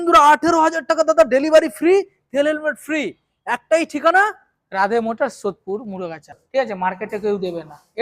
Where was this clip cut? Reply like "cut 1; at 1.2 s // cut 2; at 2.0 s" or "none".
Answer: cut 1; at 6.3 s